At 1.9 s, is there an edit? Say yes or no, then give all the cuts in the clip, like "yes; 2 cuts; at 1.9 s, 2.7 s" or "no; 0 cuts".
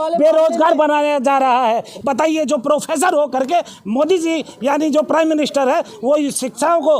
yes; 1 cut; at 1.9 s